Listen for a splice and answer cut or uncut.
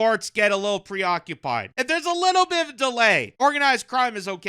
cut